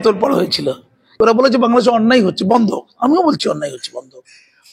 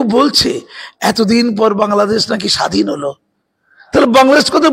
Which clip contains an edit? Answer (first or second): first